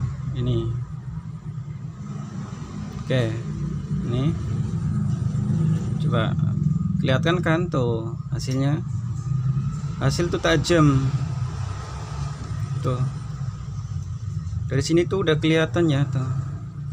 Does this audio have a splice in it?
no; 0 cuts

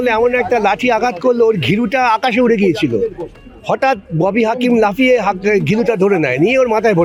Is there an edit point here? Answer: no; 0 cuts

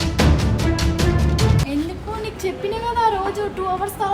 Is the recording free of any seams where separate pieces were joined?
yes; 0 cuts

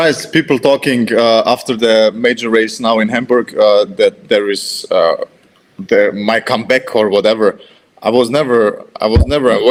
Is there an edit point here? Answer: no; 0 cuts

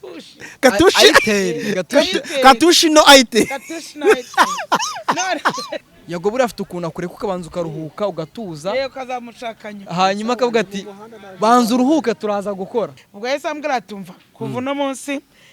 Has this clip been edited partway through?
yes; 2 cuts; at 5.8 s, 13.1 s

